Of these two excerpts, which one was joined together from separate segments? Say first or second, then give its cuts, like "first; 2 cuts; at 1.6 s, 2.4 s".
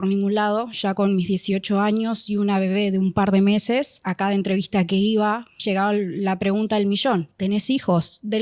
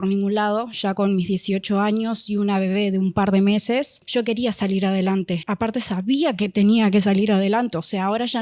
second; 1 cut; at 4.0 s